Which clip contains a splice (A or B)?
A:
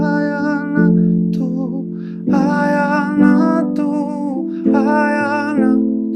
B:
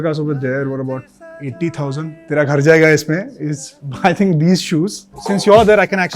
B